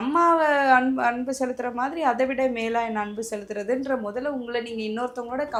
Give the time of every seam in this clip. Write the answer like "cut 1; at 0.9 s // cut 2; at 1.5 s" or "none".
none